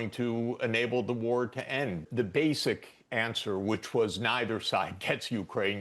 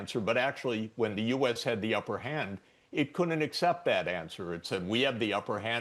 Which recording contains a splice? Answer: first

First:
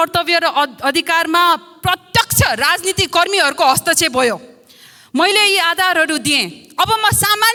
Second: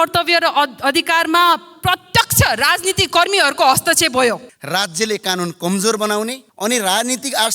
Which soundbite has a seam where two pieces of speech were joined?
second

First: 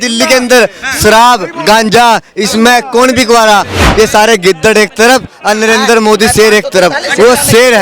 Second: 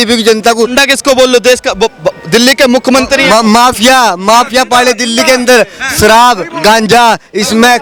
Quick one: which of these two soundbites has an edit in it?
first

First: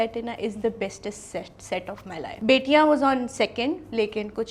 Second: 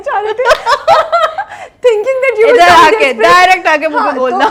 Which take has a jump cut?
first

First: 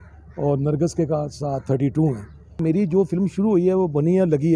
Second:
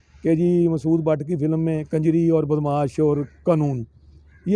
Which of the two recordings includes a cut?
first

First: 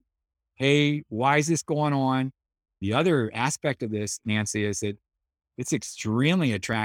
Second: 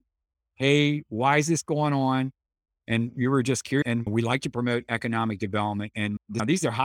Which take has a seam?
first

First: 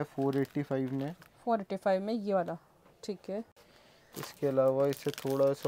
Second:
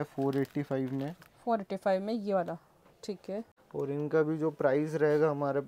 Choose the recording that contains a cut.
second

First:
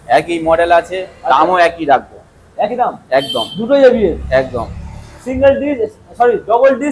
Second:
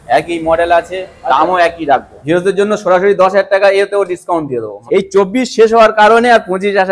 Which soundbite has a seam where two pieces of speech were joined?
second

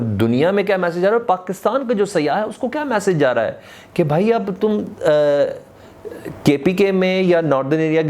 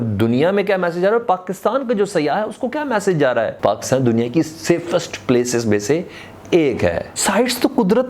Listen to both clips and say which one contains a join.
second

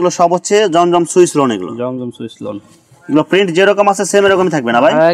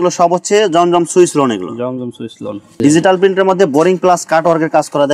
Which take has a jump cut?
second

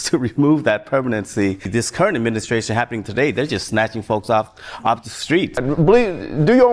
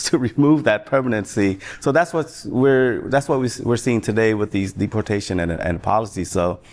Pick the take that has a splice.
first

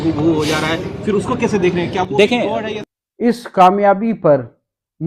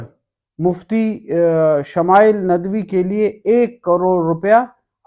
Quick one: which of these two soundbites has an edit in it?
first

